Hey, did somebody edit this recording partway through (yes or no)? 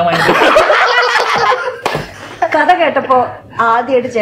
yes